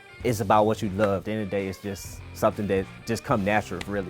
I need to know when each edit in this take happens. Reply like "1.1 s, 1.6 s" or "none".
1.2 s